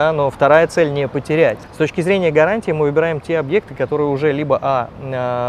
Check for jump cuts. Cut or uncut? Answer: cut